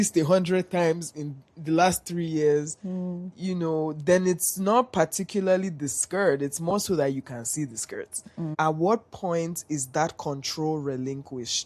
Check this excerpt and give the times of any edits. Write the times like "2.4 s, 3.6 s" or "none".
8.5 s